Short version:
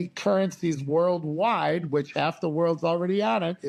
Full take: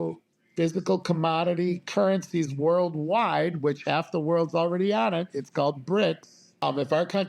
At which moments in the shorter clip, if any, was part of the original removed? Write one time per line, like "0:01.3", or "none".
none